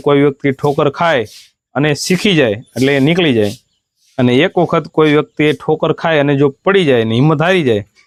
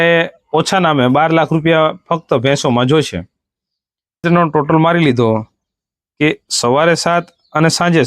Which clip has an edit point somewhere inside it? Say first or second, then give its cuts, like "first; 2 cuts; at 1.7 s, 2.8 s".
second; 1 cut; at 4.2 s